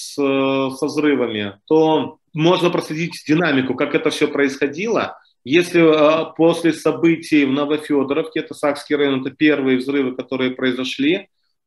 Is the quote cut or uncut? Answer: cut